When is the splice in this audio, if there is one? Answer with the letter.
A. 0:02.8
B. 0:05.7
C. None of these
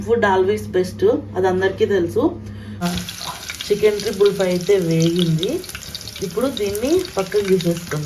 A